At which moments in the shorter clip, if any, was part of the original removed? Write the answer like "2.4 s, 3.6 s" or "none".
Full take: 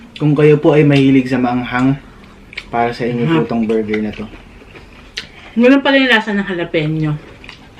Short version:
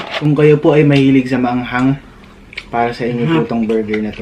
none